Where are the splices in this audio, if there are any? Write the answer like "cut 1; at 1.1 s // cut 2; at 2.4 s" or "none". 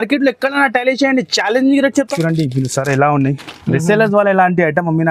cut 1; at 2.0 s